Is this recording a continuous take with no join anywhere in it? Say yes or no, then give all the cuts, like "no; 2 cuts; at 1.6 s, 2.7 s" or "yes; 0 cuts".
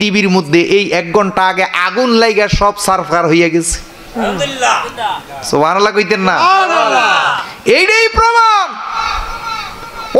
yes; 0 cuts